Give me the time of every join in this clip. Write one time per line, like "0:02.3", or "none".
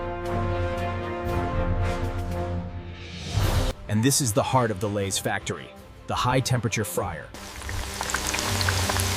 0:03.7
0:07.4

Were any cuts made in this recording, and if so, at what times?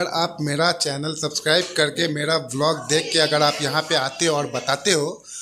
none

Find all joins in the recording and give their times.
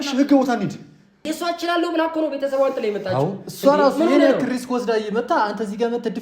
0:01.3

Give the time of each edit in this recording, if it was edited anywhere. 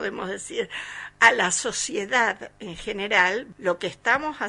0:03.5

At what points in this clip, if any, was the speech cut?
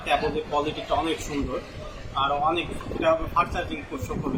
none

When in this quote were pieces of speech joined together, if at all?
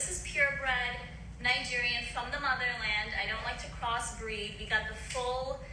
none

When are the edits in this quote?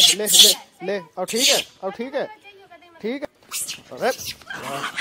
0:03.2

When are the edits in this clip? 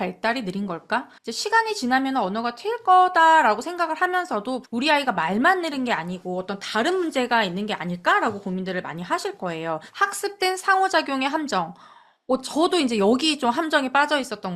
0:01.2
0:04.6
0:09.9

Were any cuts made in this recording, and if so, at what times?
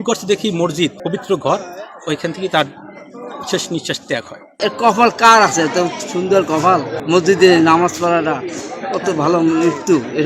0:01.0
0:04.5
0:06.9

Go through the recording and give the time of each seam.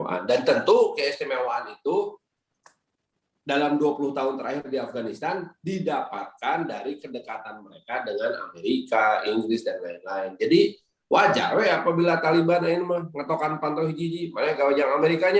none

